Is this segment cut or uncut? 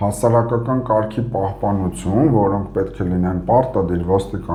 uncut